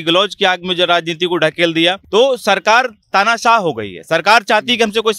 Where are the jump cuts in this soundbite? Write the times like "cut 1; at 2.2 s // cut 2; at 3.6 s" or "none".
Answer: cut 1; at 2.0 s

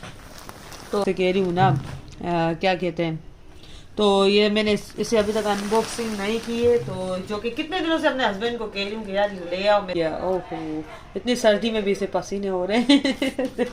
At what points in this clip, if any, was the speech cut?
cut 1; at 1.0 s // cut 2; at 9.9 s

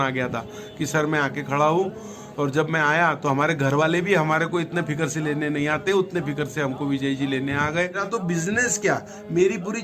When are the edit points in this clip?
cut 1; at 8.0 s

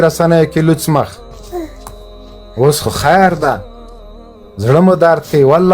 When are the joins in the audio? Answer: none

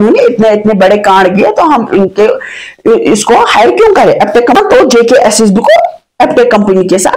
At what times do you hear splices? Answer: cut 1; at 4.6 s

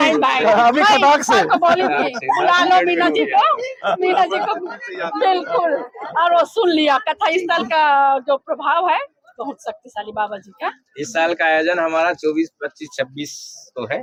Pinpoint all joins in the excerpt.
none

